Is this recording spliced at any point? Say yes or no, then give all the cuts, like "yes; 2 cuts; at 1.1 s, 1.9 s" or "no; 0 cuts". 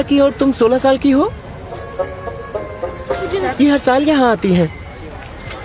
no; 0 cuts